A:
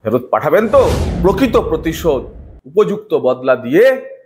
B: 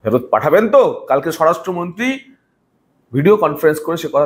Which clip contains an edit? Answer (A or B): A